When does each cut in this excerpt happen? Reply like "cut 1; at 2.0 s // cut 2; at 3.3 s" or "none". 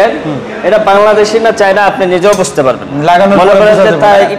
none

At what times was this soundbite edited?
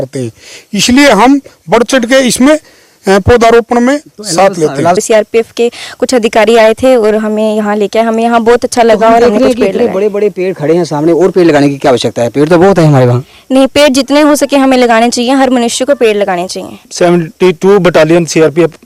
cut 1; at 5.0 s // cut 2; at 16.9 s

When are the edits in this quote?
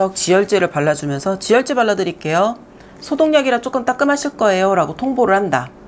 none

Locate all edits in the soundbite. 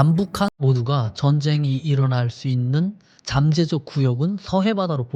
none

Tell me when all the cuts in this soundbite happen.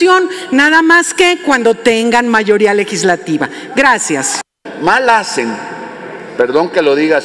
cut 1; at 4.6 s

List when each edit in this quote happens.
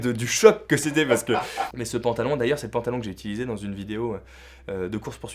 cut 1; at 1.7 s

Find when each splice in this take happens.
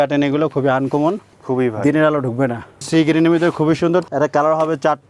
cut 1; at 1.4 s // cut 2; at 2.8 s // cut 3; at 4.1 s

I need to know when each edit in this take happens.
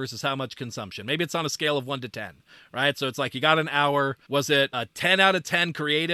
cut 1; at 4.2 s

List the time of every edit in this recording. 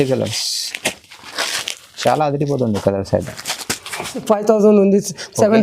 cut 1; at 4.2 s

